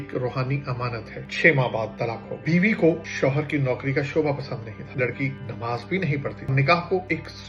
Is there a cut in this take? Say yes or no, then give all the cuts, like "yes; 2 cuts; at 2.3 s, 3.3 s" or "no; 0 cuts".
yes; 4 cuts; at 1.2 s, 2.3 s, 5.0 s, 6.5 s